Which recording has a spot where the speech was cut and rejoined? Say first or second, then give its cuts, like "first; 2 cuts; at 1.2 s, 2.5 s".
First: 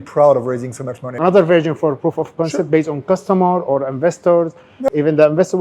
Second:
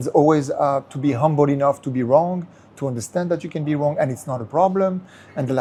first; 2 cuts; at 1.0 s, 4.7 s